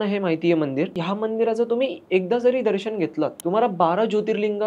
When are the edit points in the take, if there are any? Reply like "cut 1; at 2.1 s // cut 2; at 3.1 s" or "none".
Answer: cut 1; at 1.0 s // cut 2; at 3.4 s